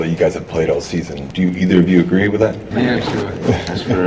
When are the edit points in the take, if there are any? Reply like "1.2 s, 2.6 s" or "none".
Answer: 1.2 s, 2.7 s